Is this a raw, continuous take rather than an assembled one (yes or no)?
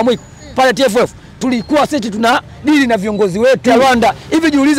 no